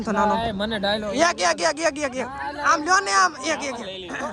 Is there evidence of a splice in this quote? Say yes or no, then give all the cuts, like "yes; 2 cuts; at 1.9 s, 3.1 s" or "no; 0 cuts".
no; 0 cuts